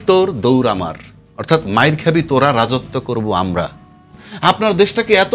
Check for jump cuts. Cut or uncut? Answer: cut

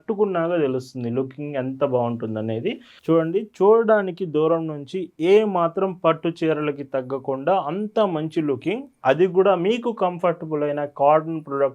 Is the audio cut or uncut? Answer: cut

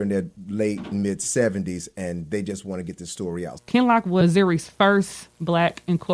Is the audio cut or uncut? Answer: cut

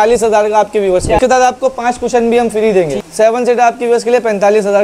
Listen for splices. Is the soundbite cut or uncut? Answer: cut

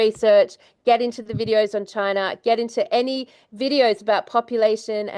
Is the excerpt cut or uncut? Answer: uncut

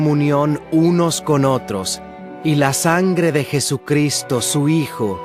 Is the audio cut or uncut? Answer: uncut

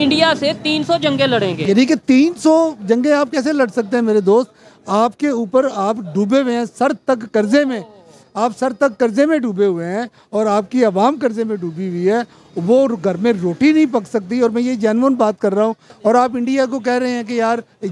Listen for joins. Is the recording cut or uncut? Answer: cut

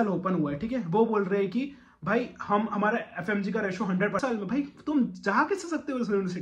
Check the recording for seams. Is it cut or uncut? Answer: cut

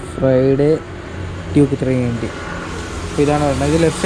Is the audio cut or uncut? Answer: uncut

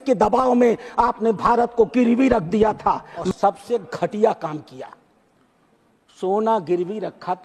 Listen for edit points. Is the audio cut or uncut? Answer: cut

